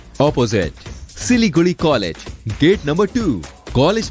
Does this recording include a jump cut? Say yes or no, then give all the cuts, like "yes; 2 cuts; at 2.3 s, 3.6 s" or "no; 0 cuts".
no; 0 cuts